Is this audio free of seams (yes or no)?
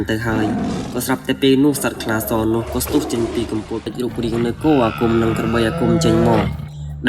no